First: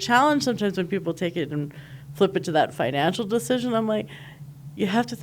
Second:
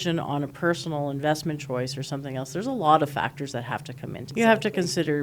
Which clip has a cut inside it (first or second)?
second